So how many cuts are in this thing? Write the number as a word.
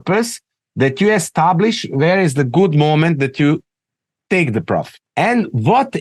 one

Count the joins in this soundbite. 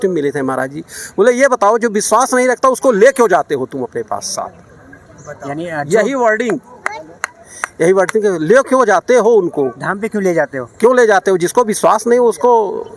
zero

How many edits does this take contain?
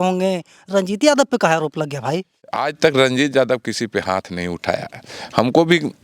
one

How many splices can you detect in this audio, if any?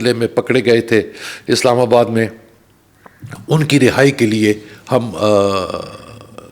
zero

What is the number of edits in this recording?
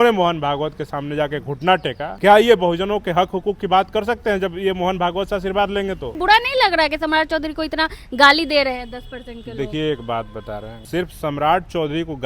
three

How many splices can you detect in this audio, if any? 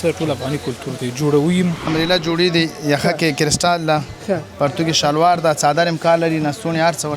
one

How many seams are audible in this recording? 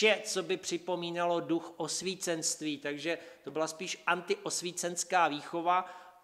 one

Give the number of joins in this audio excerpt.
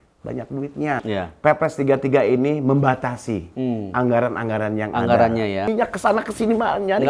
two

